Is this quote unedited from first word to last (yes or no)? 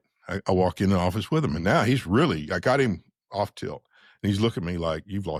yes